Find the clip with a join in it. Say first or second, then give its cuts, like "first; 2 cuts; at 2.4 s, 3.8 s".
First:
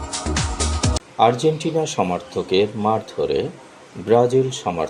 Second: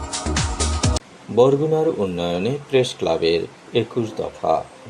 second; 1 cut; at 1.1 s